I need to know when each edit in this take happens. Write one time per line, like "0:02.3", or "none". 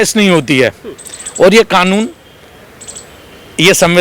none